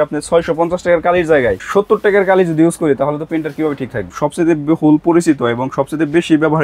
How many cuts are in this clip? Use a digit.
2